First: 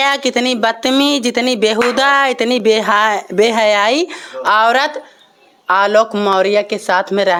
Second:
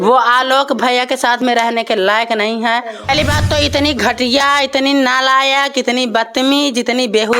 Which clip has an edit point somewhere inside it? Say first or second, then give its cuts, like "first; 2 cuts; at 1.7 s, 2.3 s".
second; 1 cut; at 3.1 s